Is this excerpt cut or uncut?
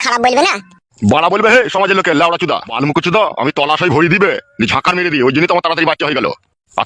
cut